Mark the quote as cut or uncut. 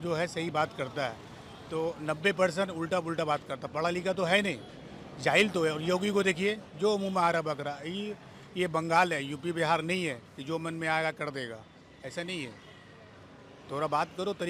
uncut